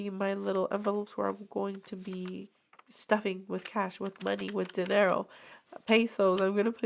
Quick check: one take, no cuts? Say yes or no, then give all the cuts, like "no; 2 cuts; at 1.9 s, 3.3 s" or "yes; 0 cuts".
yes; 0 cuts